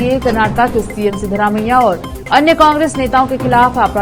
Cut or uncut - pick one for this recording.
uncut